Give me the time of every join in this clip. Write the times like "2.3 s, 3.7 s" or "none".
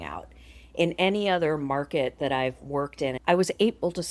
3.2 s